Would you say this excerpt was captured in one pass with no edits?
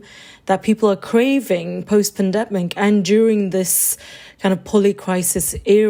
yes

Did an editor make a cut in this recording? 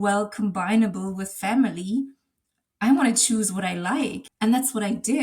yes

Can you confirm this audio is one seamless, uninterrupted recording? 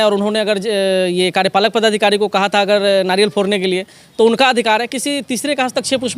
yes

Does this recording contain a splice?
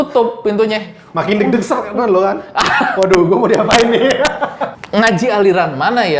yes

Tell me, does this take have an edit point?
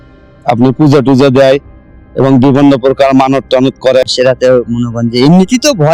yes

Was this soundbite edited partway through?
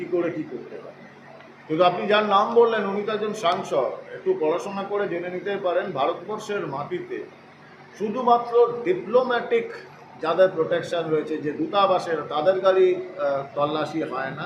no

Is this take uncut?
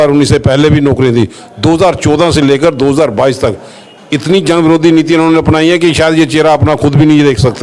yes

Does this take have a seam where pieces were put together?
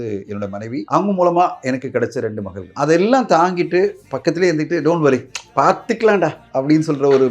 yes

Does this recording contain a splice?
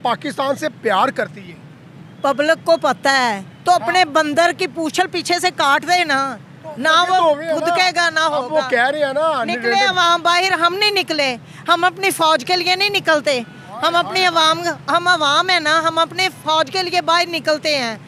no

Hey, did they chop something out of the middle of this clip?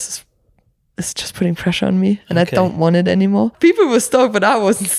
yes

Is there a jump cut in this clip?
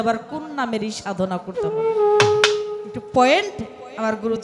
no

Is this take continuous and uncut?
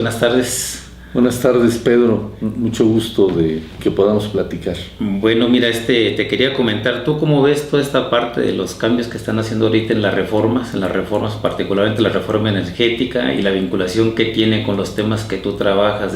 yes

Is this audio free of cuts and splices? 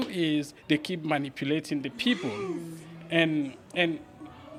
yes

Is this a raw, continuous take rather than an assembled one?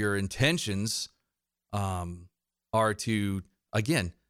yes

